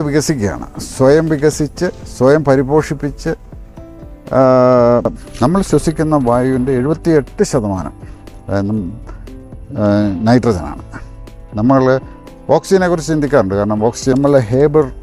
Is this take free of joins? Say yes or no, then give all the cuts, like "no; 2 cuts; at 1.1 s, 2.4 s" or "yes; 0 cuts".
no; 2 cuts; at 5.2 s, 14.0 s